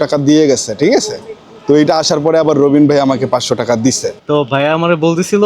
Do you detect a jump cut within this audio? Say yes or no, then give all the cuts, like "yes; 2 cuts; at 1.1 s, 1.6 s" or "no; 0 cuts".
yes; 1 cut; at 4.1 s